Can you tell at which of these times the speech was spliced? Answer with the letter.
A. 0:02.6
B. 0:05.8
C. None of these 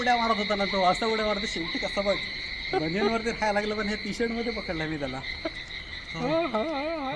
C